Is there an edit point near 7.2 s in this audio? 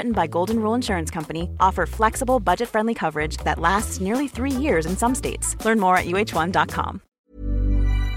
yes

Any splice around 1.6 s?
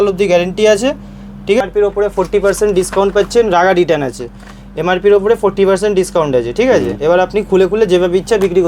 yes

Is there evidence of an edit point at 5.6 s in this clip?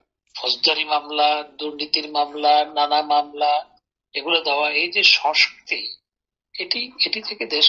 no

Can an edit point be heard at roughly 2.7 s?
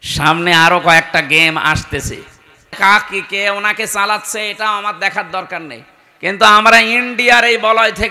yes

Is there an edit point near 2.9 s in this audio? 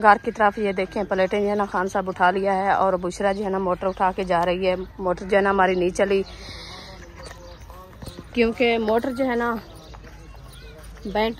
no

